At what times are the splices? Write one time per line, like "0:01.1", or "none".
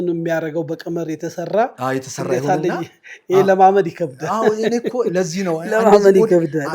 none